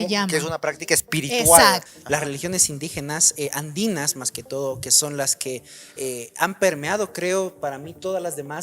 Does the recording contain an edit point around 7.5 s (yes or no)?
no